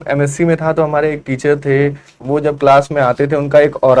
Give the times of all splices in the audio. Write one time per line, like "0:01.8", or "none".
0:02.1

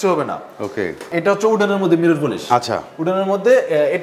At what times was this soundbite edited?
0:01.1

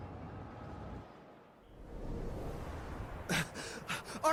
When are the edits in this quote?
none

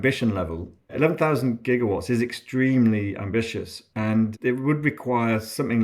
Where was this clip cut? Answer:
0:00.9
0:04.0

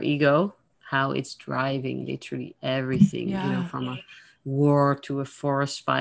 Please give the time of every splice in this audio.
none

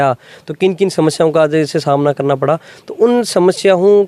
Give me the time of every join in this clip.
none

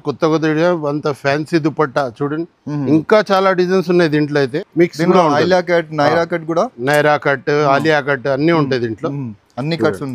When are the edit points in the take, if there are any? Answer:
0:04.4

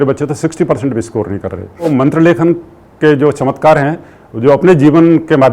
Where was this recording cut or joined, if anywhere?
0:01.9

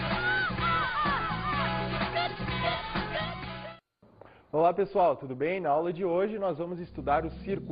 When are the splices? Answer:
none

